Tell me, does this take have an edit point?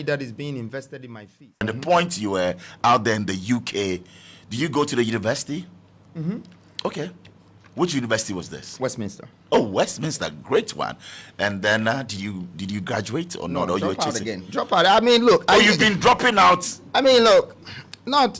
yes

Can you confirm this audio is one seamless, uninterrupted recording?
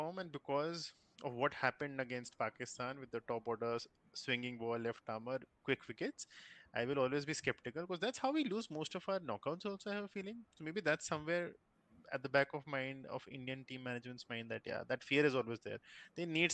yes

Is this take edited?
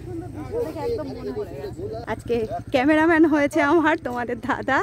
yes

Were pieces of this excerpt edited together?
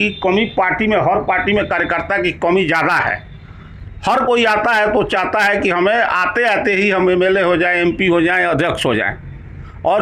no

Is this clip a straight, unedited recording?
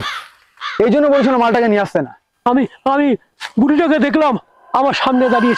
yes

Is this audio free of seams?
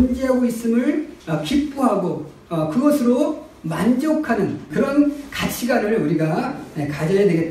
no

